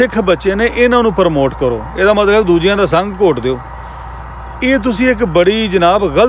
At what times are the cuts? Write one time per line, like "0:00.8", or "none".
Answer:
none